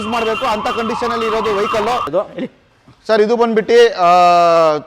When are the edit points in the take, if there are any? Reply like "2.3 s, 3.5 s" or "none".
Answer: 2.1 s